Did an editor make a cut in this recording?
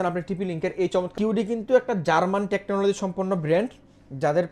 yes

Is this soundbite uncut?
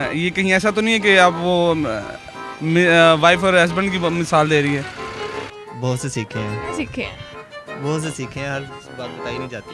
yes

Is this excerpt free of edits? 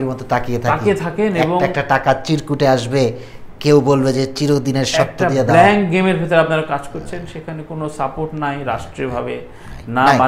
yes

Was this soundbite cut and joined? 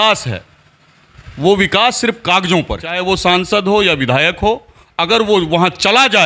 yes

